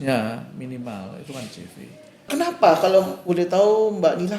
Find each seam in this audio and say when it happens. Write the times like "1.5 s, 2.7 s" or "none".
2.3 s